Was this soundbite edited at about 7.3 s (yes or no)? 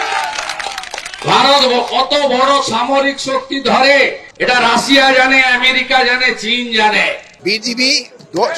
yes